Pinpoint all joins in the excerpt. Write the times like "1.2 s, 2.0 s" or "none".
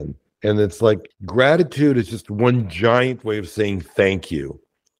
1.1 s